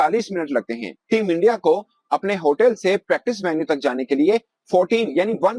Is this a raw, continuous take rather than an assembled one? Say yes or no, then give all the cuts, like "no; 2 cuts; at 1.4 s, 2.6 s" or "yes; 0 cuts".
yes; 0 cuts